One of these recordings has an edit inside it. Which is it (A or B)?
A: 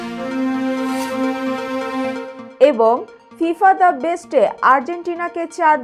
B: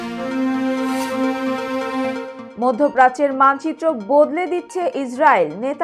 B